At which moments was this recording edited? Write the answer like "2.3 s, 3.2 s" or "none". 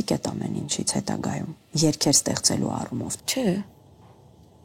1.6 s, 3.1 s